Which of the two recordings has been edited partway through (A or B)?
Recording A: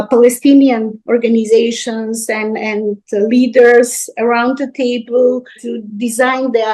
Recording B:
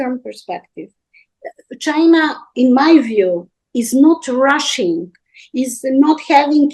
A